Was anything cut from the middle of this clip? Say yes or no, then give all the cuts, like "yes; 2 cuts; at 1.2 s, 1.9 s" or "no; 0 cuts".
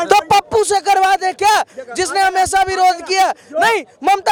no; 0 cuts